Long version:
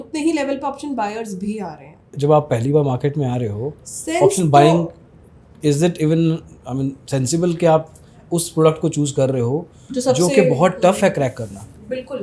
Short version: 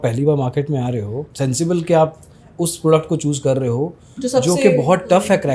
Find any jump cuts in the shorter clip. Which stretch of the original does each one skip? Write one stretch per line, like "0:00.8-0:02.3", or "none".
0:03.8-0:07.0

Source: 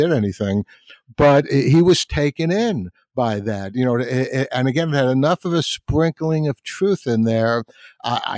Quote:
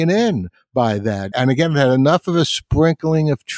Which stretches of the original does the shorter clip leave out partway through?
0:03.7-0:04.5

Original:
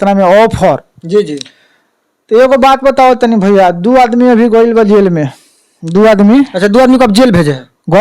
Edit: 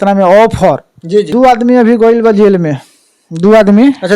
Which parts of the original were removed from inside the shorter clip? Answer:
0:01.3-0:03.8

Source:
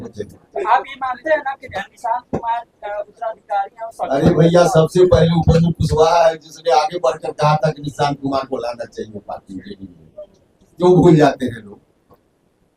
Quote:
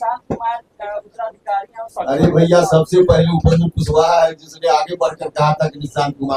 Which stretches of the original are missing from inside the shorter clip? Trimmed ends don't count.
none

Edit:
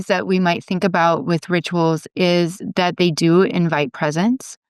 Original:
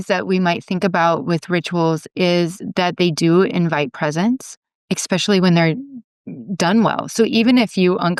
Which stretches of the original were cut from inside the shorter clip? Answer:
none

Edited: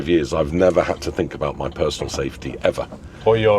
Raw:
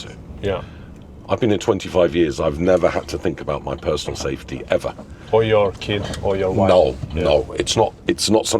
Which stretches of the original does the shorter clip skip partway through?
none

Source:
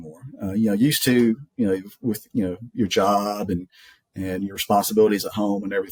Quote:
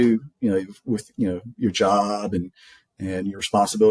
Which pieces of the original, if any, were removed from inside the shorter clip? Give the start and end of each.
none

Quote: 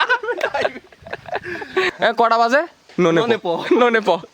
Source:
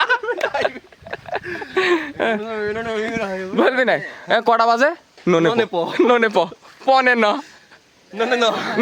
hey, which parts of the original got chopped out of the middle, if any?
0:01.9-0:04.1

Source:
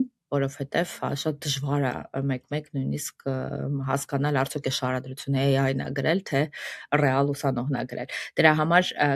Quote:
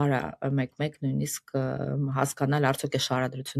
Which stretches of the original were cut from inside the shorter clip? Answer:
none

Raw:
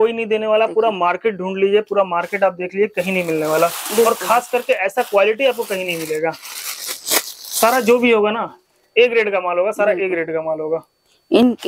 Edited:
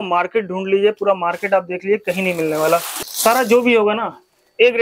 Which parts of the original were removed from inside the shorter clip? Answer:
0:03.8-0:07.3

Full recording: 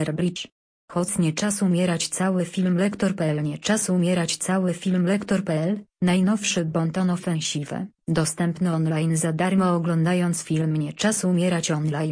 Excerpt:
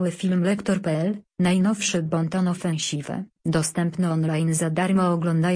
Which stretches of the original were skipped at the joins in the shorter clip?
0:03.3-0:05.5

